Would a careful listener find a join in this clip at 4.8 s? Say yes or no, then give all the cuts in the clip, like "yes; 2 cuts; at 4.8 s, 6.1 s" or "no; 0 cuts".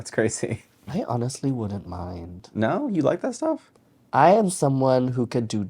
no; 1 cut; at 0.9 s